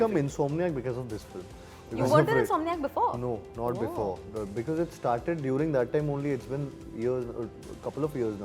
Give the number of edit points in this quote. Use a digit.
0